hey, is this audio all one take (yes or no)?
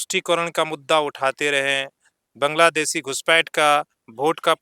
yes